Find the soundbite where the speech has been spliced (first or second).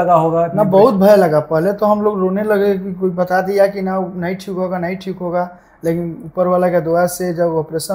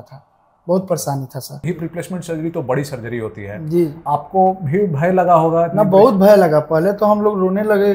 second